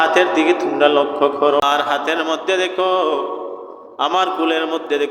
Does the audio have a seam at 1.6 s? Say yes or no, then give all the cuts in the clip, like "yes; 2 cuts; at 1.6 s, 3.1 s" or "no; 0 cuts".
yes; 1 cut; at 1.6 s